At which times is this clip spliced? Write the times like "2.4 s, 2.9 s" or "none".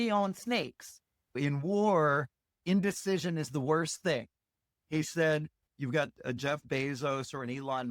1.4 s, 2.6 s, 5.6 s